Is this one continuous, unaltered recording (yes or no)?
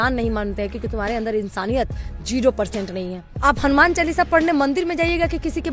yes